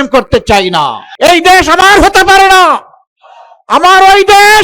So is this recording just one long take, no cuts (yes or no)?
no